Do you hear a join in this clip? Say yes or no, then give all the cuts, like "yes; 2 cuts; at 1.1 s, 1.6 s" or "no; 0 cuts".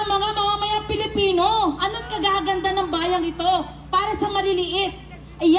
no; 0 cuts